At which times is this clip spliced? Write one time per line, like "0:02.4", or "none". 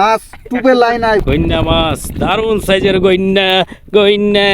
0:01.2